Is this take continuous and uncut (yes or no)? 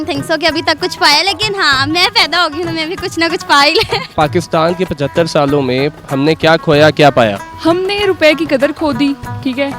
yes